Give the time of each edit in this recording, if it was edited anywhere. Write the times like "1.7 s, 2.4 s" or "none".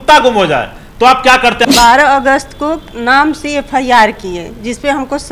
1.7 s